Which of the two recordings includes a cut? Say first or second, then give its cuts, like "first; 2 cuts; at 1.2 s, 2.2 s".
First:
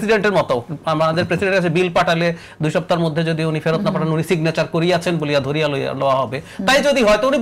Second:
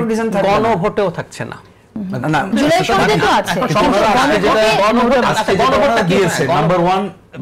second; 1 cut; at 2.5 s